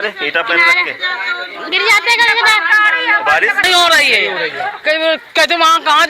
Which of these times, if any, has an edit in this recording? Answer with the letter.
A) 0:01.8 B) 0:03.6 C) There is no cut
B